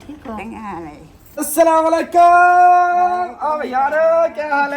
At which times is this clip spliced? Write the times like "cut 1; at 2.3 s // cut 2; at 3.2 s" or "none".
cut 1; at 1.4 s